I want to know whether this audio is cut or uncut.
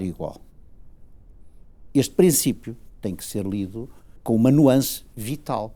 cut